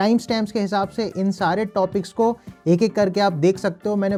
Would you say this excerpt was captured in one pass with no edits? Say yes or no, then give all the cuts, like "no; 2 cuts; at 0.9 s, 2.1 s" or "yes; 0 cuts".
yes; 0 cuts